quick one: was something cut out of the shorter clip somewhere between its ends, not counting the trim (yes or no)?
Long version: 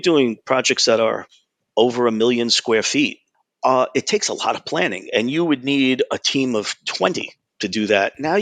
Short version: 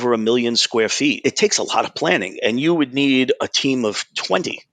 yes